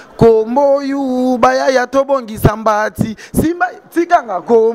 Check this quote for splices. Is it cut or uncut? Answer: uncut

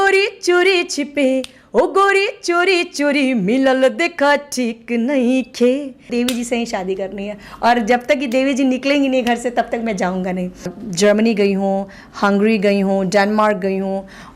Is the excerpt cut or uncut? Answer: cut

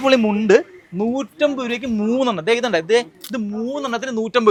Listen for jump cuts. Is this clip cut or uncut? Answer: uncut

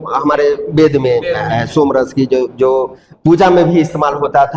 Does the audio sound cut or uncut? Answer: uncut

